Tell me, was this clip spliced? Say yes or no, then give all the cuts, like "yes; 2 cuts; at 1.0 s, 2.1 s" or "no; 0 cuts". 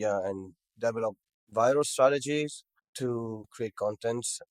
no; 0 cuts